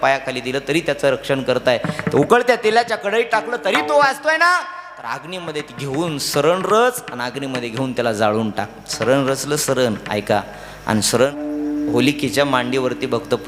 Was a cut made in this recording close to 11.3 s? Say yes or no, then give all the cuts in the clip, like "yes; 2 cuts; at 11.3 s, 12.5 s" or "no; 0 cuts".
yes; 1 cut; at 11.3 s